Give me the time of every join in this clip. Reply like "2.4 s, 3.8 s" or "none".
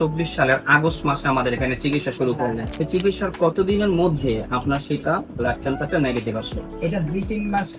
2.7 s